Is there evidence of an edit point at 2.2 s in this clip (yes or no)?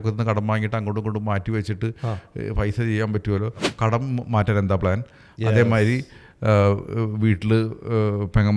no